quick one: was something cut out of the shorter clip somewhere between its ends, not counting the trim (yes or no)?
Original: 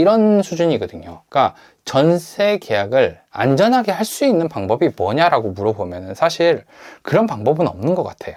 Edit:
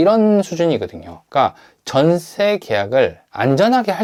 no